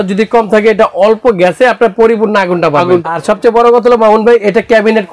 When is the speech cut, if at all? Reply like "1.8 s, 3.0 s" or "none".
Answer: 3.1 s